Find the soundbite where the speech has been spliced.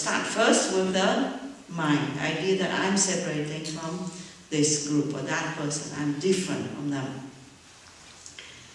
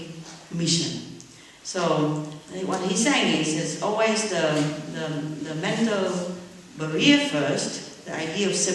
first; 1 cut; at 4.8 s

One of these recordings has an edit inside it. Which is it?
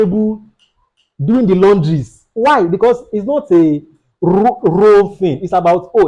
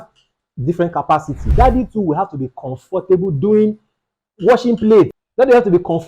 second; 2 cuts; at 1.5 s, 5.2 s

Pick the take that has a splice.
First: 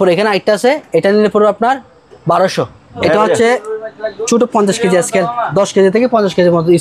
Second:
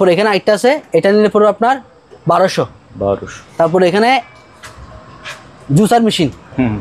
first; 1 cut; at 2.8 s

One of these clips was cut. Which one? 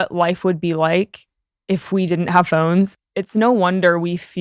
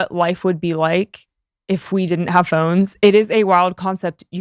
first; 1 cut; at 2.9 s

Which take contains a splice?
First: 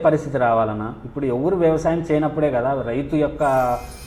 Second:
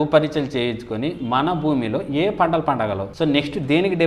second; 1 cut; at 3.0 s

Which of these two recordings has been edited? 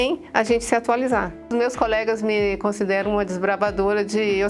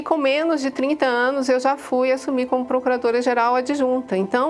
first; 1 cut; at 1.5 s

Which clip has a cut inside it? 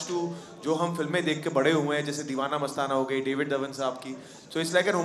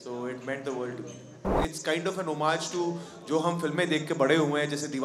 second; 1 cut; at 1.6 s

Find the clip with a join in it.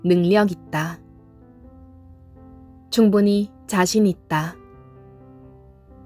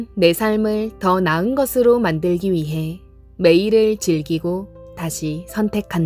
first; 1 cut; at 4.8 s

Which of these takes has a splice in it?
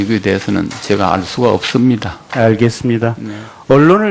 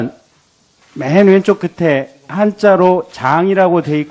first; 1 cut; at 1.9 s

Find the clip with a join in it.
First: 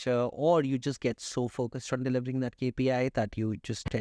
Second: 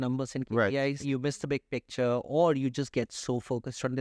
second; 1 cut; at 1.0 s

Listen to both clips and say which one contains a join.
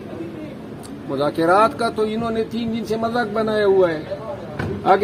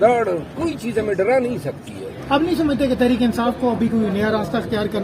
second; 1 cut; at 2.1 s

